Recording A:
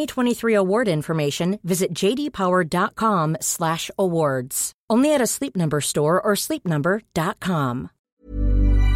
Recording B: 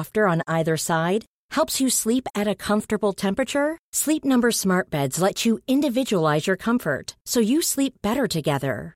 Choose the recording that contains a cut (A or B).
A